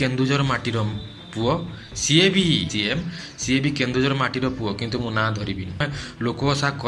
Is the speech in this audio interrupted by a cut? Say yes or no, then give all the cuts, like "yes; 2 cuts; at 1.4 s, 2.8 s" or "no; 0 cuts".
yes; 2 cuts; at 2.7 s, 5.8 s